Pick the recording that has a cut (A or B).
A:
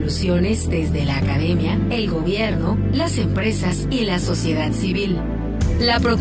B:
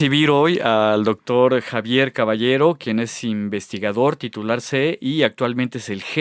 B